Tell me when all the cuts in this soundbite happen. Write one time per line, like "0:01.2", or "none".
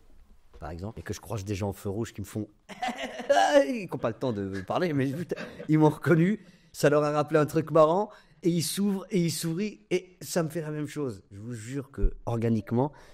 0:01.0